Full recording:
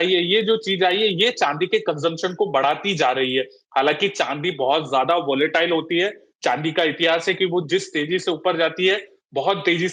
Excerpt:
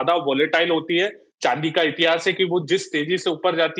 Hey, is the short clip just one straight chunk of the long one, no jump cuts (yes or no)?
yes